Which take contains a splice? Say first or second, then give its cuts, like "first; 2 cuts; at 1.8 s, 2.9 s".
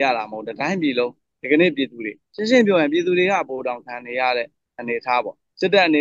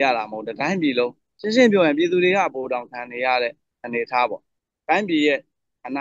second; 2 cuts; at 1.3 s, 4.5 s